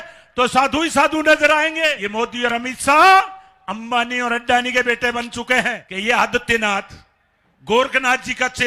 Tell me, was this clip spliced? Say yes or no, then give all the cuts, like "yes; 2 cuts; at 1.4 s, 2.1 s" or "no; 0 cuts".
yes; 2 cuts; at 2.0 s, 5.8 s